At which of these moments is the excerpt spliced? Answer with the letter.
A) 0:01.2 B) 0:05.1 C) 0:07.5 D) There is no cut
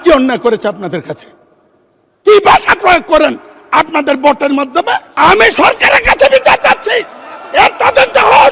B